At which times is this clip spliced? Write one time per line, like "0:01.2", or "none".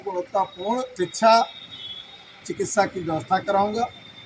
0:00.9